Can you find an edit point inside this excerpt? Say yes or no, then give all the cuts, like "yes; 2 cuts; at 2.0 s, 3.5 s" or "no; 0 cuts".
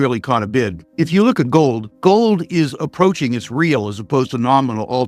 no; 0 cuts